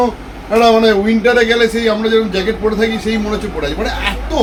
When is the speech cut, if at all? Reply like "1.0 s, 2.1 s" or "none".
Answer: none